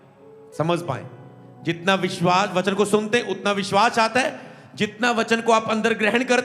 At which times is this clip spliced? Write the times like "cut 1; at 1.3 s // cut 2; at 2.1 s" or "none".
none